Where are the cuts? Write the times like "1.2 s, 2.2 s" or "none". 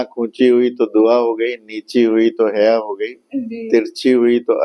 none